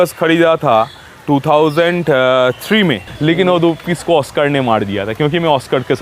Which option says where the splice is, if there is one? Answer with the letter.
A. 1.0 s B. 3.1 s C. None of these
B